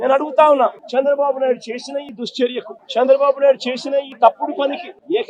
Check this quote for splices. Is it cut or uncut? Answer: uncut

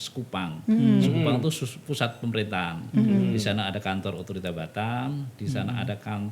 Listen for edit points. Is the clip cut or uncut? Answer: uncut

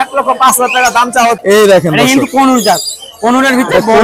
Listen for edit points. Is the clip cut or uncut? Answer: cut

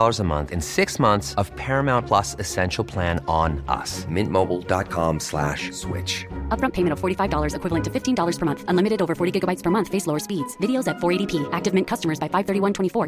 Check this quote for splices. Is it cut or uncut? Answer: uncut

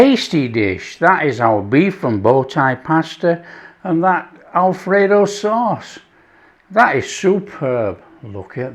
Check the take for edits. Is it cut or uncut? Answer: uncut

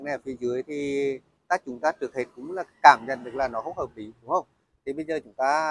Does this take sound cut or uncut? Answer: uncut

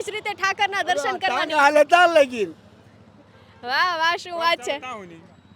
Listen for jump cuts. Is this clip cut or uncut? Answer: uncut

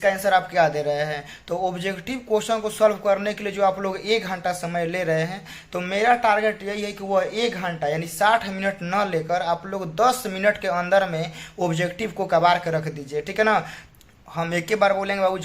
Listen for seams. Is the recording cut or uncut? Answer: cut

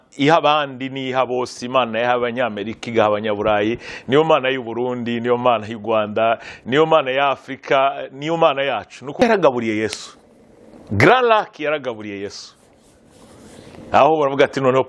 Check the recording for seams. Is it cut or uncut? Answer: cut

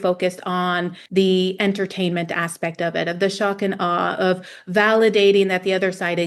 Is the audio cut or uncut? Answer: cut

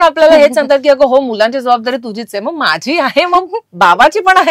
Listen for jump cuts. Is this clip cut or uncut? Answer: uncut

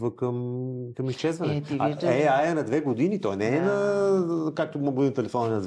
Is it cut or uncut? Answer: uncut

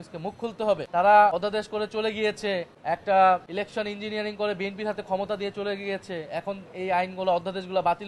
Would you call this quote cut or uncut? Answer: cut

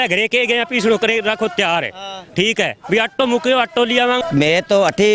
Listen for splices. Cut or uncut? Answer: cut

